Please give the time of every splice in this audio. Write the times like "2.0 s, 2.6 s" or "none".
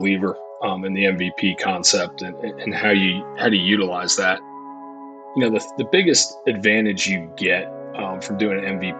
4.7 s